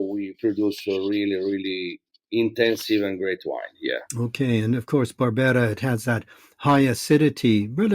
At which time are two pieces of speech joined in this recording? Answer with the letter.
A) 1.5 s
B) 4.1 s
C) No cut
B